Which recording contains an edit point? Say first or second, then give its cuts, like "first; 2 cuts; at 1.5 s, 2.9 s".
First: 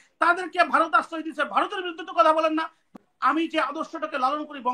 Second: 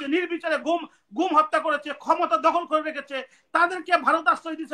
first; 1 cut; at 2.9 s